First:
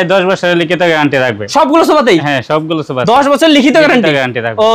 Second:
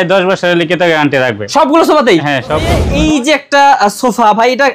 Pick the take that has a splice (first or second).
second